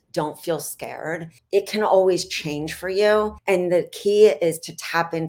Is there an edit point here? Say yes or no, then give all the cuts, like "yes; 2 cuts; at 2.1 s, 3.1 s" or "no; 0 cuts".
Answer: yes; 2 cuts; at 1.3 s, 3.4 s